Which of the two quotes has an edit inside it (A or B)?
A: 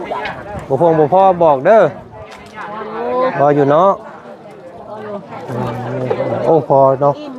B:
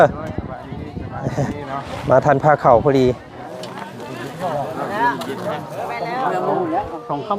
B